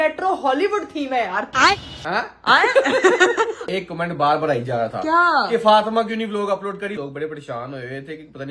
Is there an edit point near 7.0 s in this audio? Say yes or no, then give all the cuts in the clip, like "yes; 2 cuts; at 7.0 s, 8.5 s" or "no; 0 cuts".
yes; 2 cuts; at 3.6 s, 7.0 s